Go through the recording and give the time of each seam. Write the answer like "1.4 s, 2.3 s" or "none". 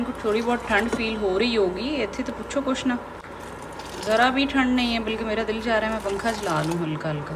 none

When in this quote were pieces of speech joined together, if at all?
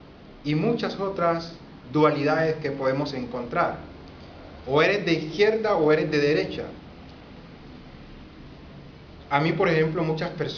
2.9 s

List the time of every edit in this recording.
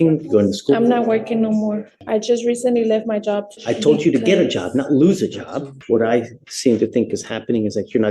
1.9 s, 3.5 s, 5.7 s

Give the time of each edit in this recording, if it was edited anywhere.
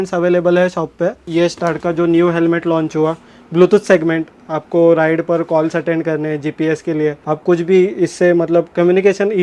1.2 s, 7.2 s

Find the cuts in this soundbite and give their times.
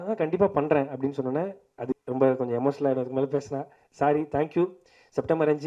1.9 s

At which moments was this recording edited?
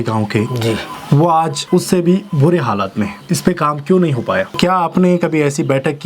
0.9 s, 1.6 s, 3.2 s, 4.5 s

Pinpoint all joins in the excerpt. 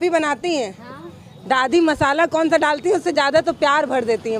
none

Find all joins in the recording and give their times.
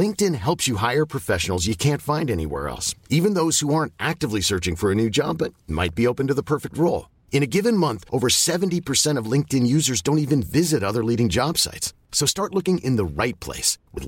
none

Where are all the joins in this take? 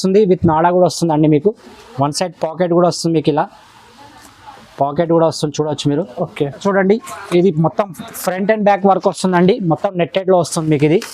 6.6 s

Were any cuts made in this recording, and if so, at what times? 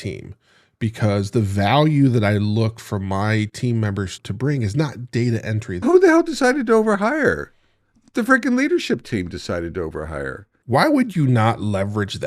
4.2 s, 5.8 s, 10.5 s

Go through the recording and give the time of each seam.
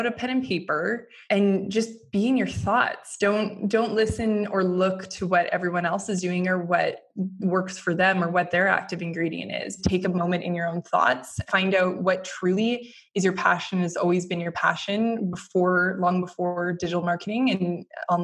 1.1 s, 9.8 s, 11.3 s

